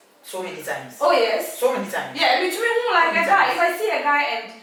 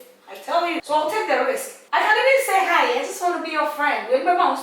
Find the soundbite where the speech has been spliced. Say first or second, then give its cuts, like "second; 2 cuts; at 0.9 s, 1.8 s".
second; 2 cuts; at 0.8 s, 1.7 s